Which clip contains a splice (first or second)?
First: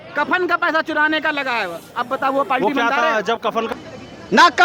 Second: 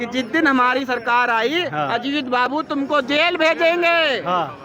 first